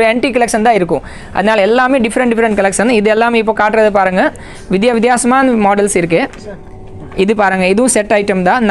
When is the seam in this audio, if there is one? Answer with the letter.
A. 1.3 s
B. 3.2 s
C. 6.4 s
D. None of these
D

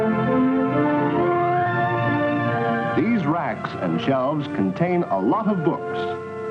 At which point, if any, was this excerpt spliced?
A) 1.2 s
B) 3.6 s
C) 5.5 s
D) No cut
B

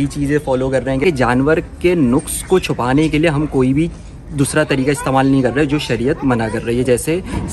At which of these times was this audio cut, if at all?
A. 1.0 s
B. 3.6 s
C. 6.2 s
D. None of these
A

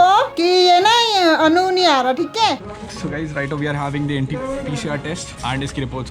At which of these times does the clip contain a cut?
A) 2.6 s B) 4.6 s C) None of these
A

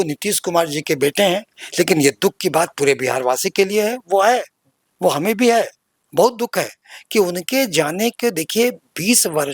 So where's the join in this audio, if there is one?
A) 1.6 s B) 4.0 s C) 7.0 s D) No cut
A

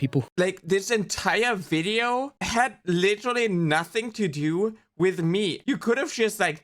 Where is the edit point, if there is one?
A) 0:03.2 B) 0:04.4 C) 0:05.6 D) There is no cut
C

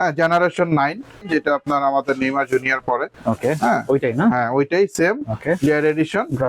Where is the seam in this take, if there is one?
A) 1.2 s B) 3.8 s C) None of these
A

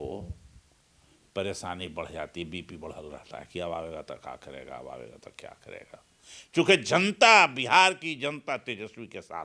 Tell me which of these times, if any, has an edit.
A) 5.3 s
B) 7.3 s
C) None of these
C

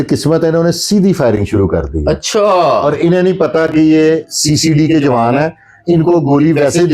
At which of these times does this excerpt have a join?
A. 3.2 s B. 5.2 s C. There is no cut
C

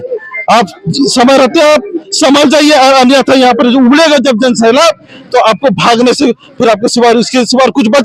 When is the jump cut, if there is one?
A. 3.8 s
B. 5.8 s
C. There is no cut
C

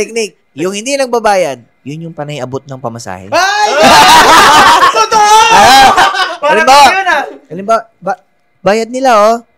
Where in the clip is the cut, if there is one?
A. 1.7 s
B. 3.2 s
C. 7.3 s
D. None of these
D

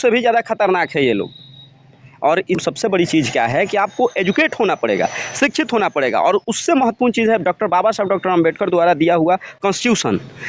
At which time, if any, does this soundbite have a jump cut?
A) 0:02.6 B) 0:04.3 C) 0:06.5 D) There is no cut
A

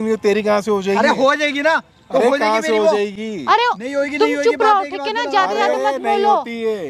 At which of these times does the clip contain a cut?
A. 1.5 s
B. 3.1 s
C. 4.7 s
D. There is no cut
D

